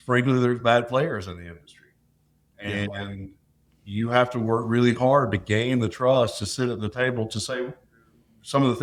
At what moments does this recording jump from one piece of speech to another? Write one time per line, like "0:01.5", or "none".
none